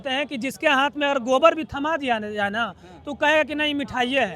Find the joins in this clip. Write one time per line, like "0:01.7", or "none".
none